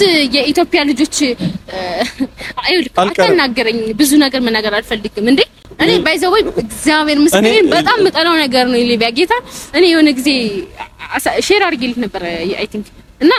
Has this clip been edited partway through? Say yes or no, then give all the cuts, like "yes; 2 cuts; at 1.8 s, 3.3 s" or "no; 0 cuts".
no; 0 cuts